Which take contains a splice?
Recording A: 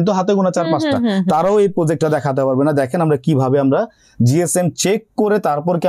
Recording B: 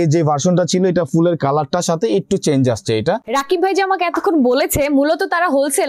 B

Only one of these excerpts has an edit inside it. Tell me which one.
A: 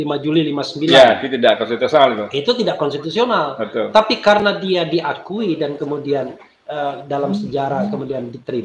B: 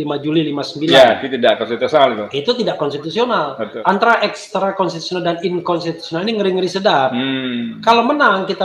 B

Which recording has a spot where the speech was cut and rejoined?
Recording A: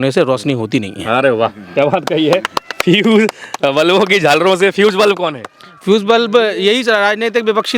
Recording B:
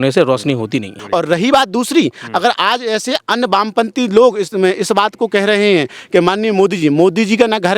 B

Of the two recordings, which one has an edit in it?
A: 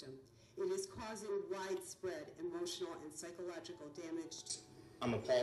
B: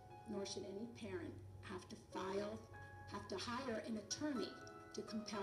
A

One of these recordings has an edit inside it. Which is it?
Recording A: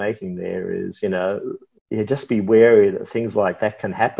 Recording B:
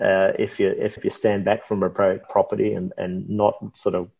B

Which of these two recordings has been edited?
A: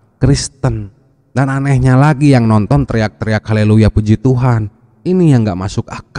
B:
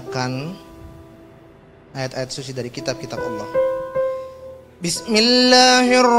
B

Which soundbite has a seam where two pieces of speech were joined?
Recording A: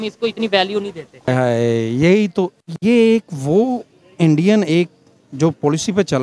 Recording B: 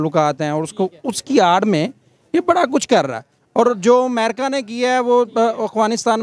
A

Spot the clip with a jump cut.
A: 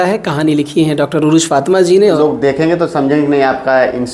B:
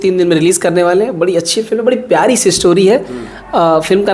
A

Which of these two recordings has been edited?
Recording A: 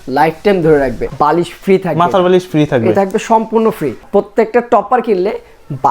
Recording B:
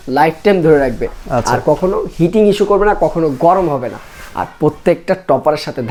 A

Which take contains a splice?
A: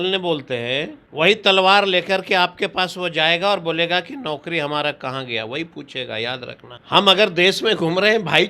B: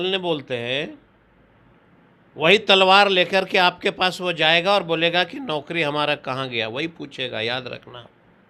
A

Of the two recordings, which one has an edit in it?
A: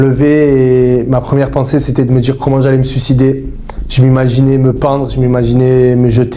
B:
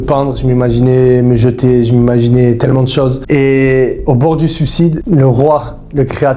B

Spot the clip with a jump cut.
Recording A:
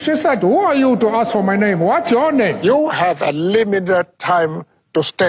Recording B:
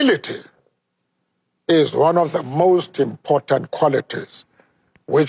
A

